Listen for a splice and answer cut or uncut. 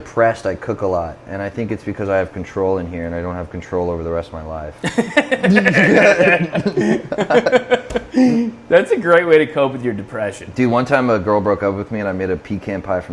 uncut